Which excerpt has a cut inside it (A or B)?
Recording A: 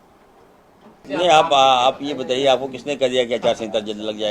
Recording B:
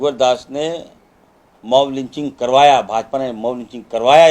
A